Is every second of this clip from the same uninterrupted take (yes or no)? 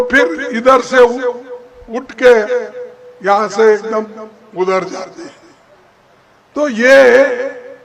yes